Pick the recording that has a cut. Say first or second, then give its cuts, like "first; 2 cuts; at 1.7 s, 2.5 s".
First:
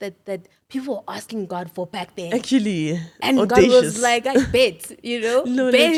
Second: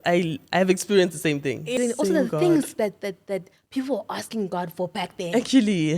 second; 1 cut; at 1.7 s